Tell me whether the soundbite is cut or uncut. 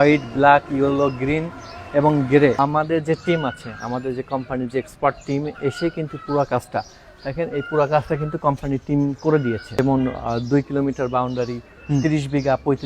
cut